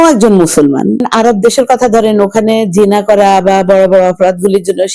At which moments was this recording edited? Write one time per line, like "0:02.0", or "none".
0:01.0